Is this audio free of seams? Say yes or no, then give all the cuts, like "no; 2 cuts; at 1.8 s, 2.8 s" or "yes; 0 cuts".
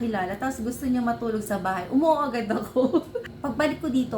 no; 1 cut; at 3.2 s